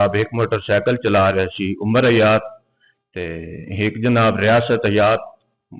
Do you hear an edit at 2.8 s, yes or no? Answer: no